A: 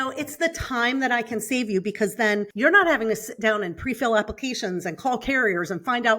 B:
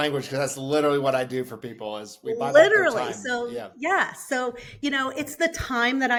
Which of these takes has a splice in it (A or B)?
A